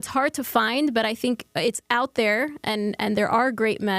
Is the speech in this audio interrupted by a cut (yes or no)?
no